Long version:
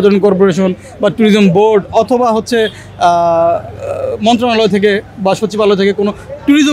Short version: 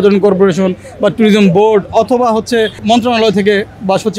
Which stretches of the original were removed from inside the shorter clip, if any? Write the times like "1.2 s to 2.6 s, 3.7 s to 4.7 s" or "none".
2.8 s to 4.1 s